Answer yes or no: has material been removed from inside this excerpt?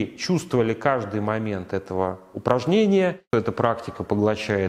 yes